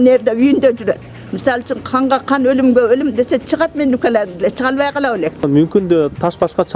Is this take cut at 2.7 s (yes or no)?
no